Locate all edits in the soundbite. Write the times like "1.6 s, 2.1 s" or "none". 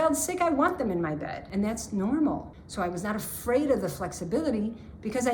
1.4 s, 2.6 s